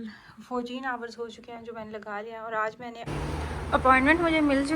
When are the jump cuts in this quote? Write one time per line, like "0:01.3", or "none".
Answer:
0:03.0